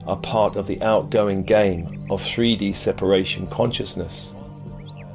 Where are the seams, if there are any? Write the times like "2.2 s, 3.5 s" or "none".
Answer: 4.1 s